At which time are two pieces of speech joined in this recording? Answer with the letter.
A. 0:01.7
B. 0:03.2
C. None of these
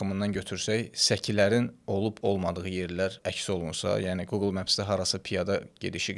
B